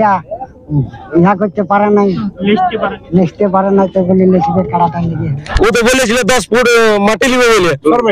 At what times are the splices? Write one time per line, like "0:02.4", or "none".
0:05.4